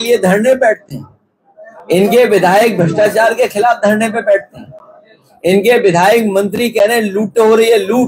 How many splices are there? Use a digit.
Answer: 0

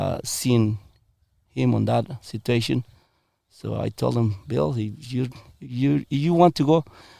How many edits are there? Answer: 0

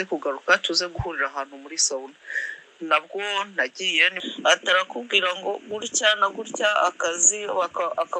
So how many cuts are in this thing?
1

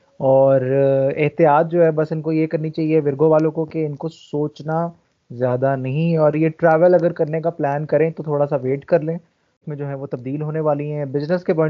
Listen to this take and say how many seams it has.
1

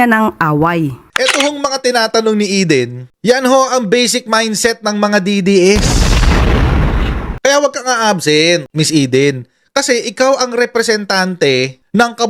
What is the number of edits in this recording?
2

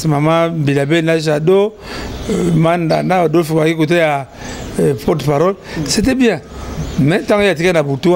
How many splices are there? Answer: 0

